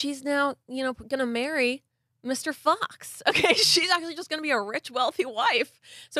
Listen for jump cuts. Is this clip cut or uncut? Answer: uncut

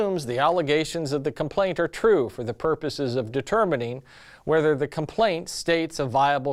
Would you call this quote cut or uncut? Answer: uncut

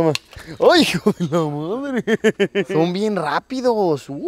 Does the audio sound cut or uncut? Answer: cut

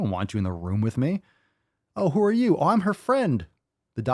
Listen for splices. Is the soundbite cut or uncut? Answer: uncut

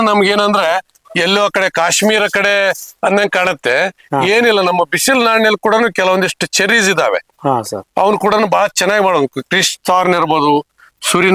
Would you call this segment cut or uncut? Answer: uncut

